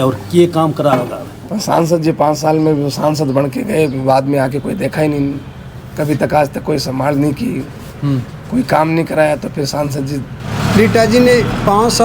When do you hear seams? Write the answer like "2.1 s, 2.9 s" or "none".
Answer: 1.4 s, 10.6 s